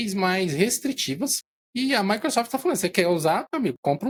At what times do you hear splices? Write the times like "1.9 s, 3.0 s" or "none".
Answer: none